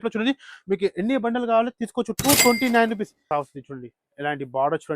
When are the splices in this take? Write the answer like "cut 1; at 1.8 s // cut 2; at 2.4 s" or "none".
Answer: cut 1; at 3.2 s